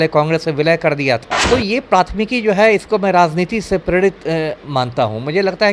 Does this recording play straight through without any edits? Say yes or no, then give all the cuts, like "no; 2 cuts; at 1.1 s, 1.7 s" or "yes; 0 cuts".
no; 1 cut; at 1.3 s